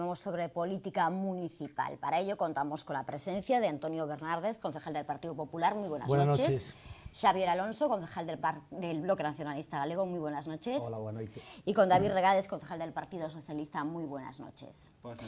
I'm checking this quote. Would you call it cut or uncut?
uncut